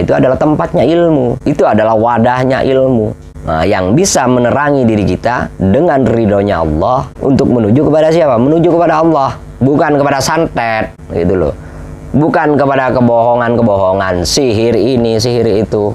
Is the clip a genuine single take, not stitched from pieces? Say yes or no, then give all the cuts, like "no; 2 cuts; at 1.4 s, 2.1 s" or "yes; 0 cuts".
no; 3 cuts; at 1.4 s, 7.1 s, 11.0 s